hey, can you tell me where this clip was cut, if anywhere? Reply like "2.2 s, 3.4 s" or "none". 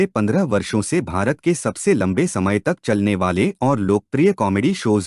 2.5 s